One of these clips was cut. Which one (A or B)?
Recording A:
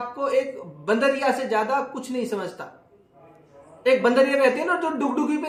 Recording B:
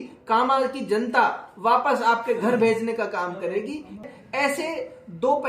B